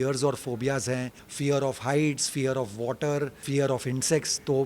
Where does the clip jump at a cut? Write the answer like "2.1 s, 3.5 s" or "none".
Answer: 1.2 s, 3.4 s